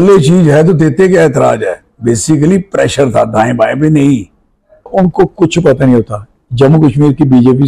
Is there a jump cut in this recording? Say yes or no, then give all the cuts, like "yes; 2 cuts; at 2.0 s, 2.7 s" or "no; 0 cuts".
yes; 1 cut; at 4.9 s